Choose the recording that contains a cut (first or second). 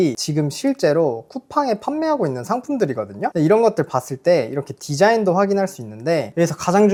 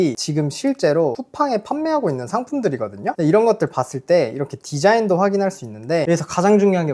second